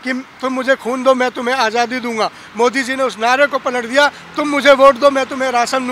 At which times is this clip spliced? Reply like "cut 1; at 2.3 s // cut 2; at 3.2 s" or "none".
none